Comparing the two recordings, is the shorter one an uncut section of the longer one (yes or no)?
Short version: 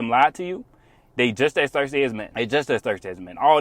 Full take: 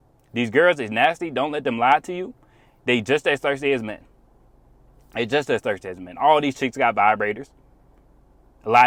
no